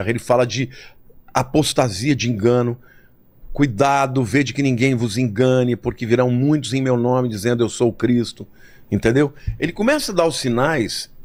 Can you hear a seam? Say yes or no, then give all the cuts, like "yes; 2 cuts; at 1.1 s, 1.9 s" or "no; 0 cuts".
no; 0 cuts